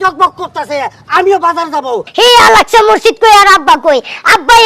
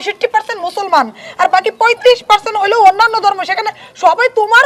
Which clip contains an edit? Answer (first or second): first